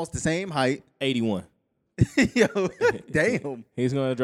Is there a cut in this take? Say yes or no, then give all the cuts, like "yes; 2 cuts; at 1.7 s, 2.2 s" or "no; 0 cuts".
no; 0 cuts